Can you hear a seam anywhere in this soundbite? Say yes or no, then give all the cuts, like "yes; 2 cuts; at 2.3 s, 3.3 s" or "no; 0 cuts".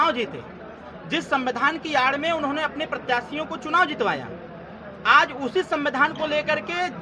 no; 0 cuts